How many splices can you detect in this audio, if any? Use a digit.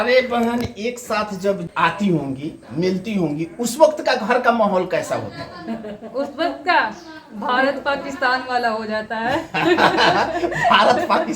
1